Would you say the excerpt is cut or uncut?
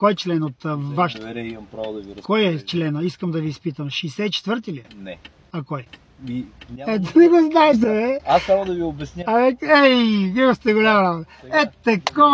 uncut